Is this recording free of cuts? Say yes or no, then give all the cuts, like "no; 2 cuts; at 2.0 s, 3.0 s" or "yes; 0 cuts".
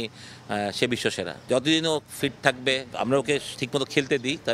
no; 2 cuts; at 1.4 s, 2.9 s